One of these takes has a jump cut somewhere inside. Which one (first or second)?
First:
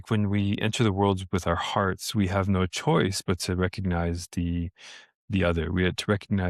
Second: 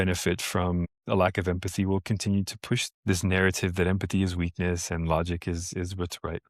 second